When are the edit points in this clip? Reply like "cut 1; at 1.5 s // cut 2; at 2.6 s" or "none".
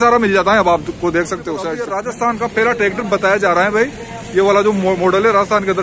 cut 1; at 1.9 s